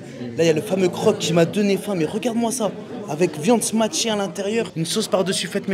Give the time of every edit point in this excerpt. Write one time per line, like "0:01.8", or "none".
none